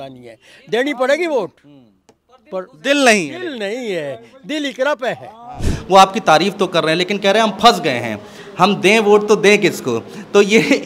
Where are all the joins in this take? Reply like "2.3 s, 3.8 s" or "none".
5.7 s